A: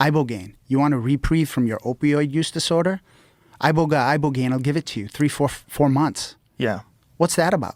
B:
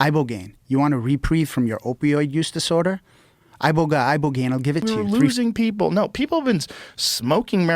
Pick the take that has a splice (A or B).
B